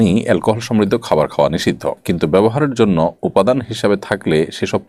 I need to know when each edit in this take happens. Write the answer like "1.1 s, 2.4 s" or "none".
none